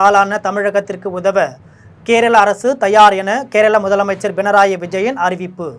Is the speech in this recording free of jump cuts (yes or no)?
yes